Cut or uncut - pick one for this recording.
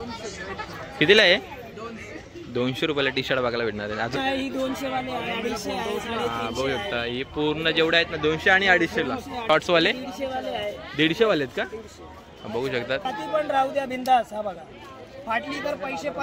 cut